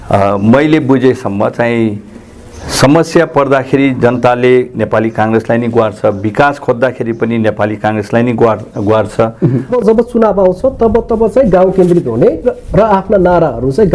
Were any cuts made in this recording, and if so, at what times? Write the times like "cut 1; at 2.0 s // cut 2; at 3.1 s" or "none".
cut 1; at 9.7 s